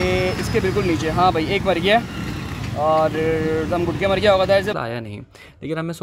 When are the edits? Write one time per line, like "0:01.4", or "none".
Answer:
0:04.7